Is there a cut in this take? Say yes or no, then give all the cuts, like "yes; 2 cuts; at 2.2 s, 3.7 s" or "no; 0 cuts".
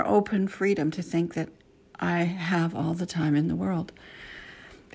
no; 0 cuts